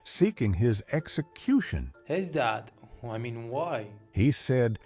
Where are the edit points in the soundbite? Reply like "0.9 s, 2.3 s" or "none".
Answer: none